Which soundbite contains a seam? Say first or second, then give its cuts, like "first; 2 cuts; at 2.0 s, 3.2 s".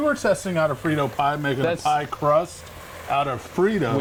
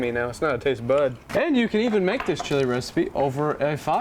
second; 1 cut; at 1.2 s